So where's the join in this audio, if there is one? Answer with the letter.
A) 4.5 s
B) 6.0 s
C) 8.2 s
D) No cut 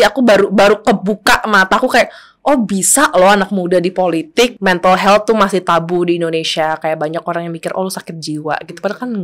A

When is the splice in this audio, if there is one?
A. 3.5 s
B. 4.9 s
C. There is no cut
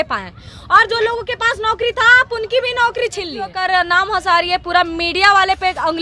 A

